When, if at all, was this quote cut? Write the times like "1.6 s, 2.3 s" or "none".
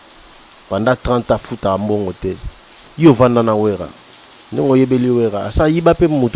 none